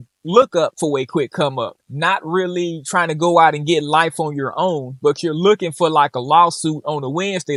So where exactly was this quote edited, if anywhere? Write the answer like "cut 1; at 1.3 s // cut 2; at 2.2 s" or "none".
none